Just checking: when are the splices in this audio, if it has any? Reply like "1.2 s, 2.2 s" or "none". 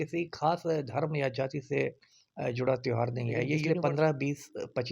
3.6 s